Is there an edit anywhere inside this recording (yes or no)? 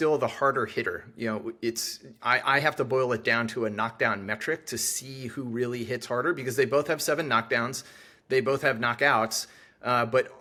no